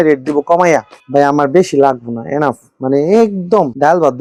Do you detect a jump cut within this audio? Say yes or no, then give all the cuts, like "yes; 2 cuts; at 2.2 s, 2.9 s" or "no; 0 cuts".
no; 0 cuts